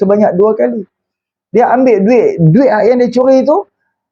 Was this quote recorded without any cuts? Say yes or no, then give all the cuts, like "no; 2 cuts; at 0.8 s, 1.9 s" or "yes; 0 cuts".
yes; 0 cuts